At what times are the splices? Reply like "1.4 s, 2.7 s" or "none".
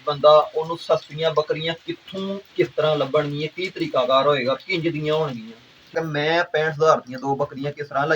5.9 s